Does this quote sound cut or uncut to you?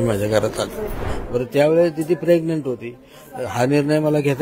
cut